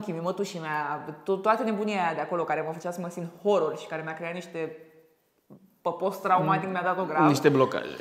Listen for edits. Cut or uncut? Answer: uncut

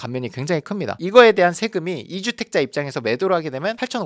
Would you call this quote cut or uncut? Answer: cut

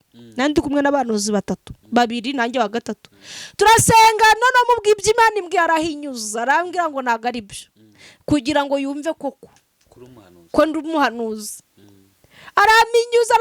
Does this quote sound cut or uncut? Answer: uncut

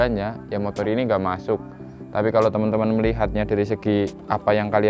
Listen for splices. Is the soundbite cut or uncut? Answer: uncut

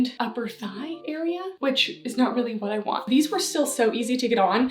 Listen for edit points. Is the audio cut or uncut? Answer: cut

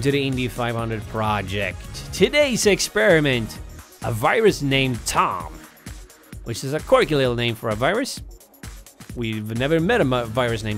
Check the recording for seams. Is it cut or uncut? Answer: uncut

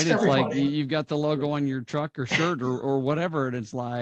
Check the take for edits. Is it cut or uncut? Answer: uncut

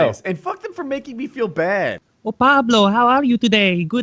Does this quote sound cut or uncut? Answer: cut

